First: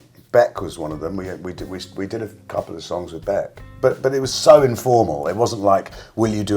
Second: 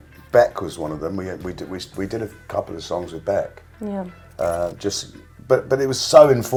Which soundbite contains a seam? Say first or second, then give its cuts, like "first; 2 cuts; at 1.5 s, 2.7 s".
first; 1 cut; at 3.6 s